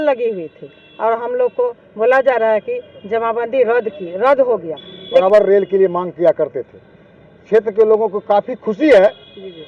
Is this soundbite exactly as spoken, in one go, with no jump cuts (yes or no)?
no